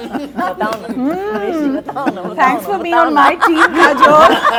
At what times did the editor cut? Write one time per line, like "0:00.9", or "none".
none